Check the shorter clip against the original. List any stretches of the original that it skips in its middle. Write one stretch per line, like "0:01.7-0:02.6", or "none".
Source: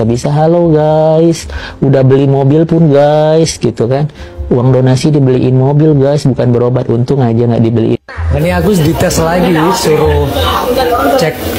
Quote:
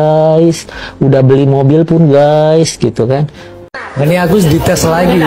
0:04.5-0:08.0